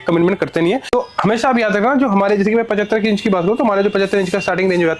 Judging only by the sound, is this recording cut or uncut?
cut